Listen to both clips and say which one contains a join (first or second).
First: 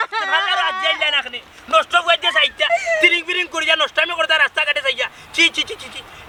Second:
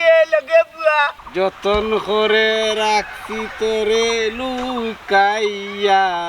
second